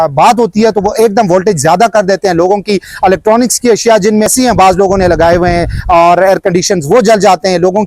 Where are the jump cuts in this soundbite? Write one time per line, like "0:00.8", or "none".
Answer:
0:04.3